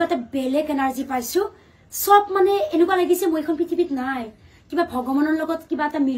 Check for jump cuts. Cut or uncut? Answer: uncut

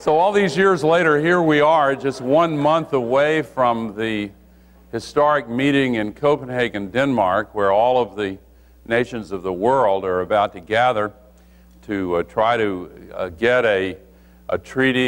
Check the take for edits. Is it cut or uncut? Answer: uncut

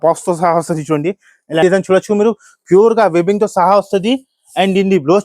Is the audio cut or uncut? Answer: cut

